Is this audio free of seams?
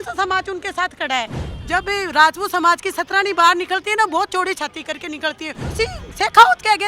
no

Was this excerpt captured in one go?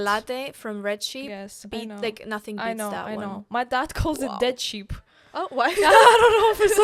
yes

